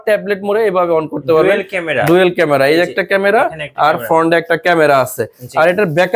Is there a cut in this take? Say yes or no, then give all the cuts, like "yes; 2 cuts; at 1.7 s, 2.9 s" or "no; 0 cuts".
no; 0 cuts